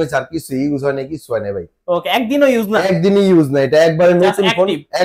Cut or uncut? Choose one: uncut